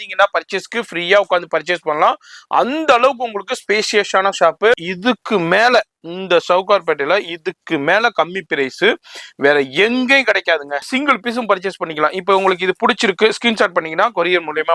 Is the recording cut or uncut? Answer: cut